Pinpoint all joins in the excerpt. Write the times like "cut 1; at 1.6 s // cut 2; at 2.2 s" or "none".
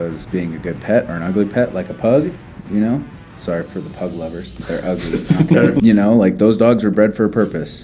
cut 1; at 5.8 s